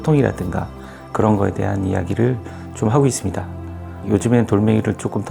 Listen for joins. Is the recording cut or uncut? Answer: cut